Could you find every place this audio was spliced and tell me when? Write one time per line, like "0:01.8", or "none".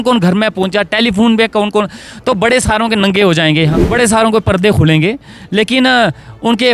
0:03.8